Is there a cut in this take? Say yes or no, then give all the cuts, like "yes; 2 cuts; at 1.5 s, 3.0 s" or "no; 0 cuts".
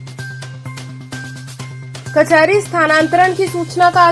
yes; 2 cuts; at 1.2 s, 2.0 s